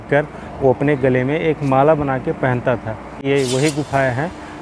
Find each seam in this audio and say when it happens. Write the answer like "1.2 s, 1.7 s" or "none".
3.2 s